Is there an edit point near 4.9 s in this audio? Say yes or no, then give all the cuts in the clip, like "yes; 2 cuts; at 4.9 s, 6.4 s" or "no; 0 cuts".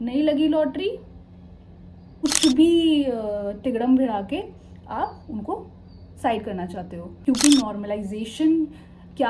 no; 2 cuts; at 2.1 s, 7.1 s